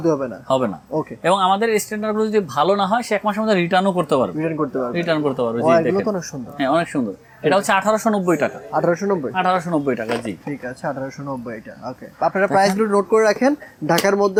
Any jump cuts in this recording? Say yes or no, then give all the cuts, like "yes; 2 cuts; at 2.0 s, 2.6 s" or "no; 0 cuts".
no; 0 cuts